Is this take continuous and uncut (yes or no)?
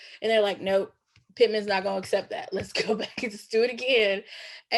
yes